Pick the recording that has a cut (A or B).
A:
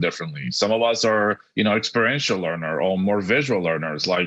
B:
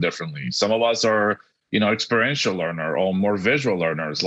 A